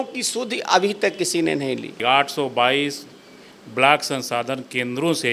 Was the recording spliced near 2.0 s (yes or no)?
yes